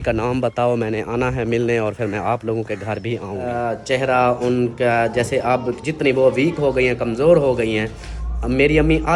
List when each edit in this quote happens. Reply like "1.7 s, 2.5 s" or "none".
3.4 s